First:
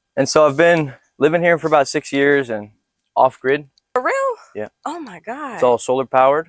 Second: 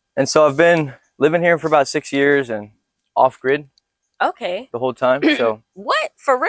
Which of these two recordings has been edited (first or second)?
first